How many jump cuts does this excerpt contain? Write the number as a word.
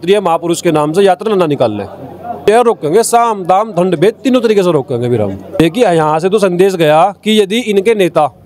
two